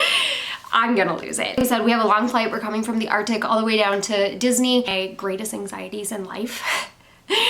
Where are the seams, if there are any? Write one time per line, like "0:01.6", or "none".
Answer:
0:01.6
0:04.9